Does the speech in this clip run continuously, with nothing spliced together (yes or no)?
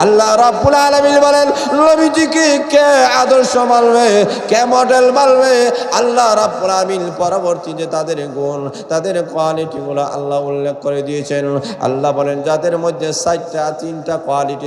yes